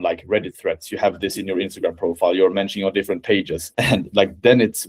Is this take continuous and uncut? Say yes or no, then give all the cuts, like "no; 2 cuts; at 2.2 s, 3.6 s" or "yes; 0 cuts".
no; 1 cut; at 3.6 s